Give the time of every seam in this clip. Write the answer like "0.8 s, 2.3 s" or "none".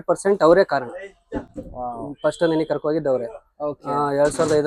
none